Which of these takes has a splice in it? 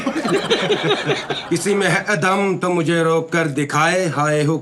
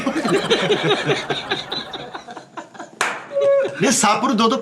first; 1 cut; at 1.3 s

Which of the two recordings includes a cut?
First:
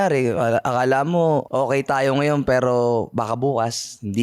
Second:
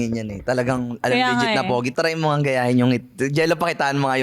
second; 1 cut; at 1.9 s

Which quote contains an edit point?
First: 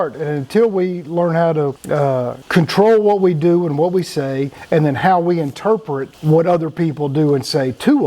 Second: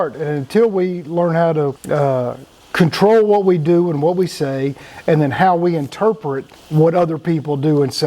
first; 3 cuts; at 2.4 s, 4.5 s, 6.1 s

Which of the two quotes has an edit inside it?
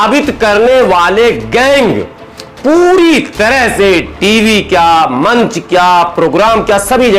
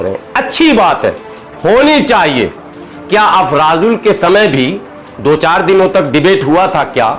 second; 1 cut; at 2.7 s

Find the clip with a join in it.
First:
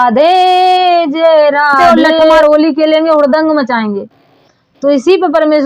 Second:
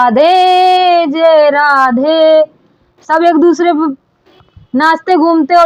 first; 1 cut; at 2.4 s

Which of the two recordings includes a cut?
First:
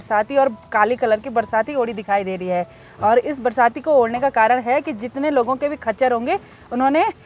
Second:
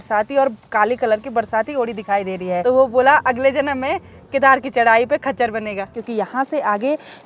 second; 2 cuts; at 2.6 s, 6.0 s

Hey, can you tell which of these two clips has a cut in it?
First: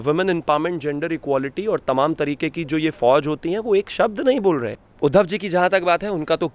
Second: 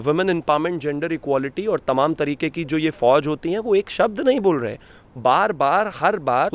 first; 1 cut; at 4.8 s

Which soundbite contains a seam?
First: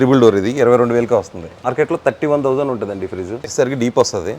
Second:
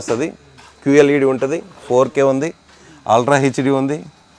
first; 2 cuts; at 1.7 s, 3.5 s

